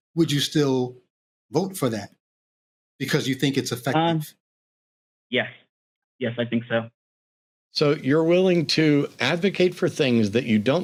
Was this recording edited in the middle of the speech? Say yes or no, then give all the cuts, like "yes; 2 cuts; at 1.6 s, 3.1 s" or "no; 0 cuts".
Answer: no; 0 cuts